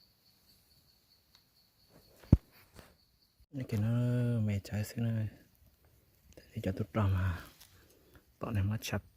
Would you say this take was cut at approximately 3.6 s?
yes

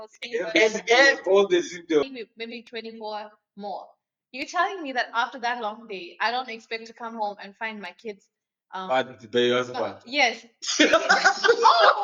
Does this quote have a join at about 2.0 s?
yes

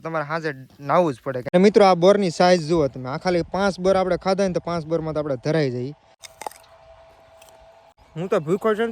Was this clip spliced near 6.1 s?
yes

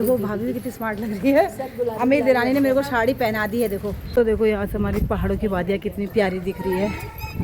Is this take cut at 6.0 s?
no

